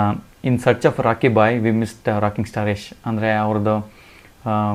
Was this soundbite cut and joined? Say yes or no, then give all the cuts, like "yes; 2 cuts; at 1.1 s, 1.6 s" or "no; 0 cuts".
no; 0 cuts